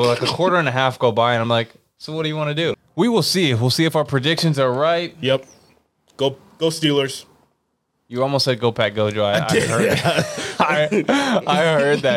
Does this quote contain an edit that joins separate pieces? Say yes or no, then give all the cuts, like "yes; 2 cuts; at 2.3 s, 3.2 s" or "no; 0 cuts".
yes; 1 cut; at 2.7 s